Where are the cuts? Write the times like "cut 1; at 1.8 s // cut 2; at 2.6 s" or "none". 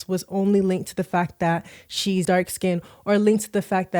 cut 1; at 2.2 s